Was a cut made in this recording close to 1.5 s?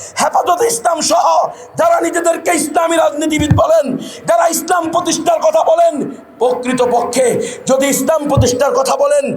no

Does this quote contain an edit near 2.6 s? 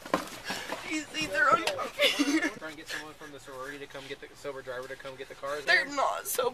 yes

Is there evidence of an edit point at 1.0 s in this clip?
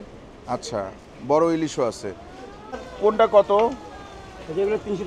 no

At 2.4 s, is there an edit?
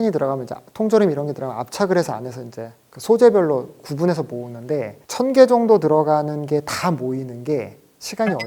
no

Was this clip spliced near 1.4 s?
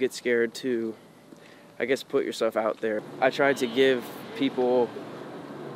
no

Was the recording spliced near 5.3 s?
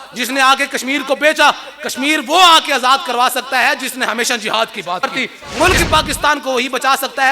yes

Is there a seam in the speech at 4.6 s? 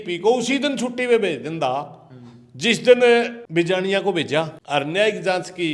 yes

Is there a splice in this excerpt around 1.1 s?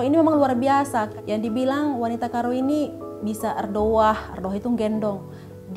yes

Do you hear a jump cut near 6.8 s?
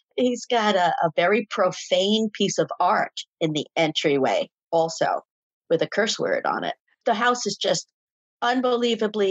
yes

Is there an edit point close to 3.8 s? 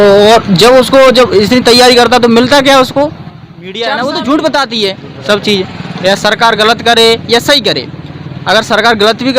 yes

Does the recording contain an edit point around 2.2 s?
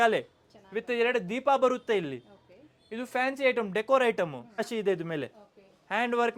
no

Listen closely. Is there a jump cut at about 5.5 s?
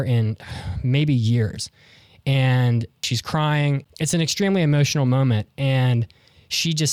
no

